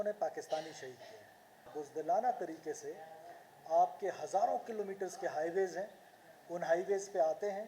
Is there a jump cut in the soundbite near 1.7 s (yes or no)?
yes